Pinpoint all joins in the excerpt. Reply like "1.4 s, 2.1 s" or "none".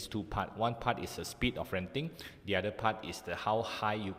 none